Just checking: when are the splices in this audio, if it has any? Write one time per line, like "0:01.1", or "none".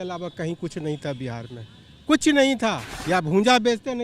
0:02.9